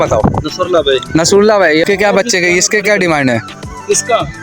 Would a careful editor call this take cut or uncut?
cut